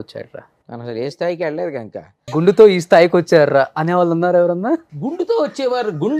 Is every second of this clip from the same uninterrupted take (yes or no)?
no